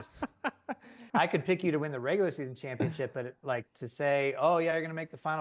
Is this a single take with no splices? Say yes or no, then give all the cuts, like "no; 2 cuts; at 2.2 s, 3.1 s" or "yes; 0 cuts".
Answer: no; 1 cut; at 1.0 s